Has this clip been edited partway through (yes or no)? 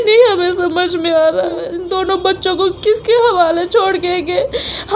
yes